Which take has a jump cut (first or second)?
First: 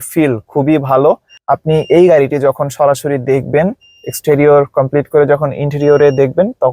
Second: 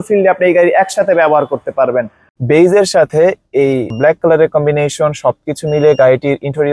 second